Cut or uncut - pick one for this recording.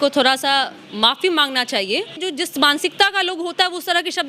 cut